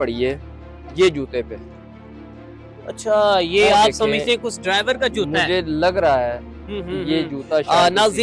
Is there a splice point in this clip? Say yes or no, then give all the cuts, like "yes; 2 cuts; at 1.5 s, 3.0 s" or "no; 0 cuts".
no; 0 cuts